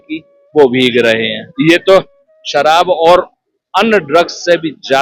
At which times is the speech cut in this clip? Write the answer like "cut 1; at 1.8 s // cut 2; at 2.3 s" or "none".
cut 1; at 1.4 s